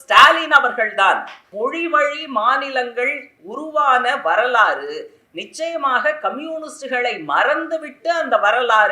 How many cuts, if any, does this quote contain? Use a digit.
1